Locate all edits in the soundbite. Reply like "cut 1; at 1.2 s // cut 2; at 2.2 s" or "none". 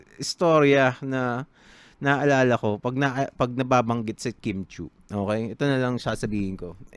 none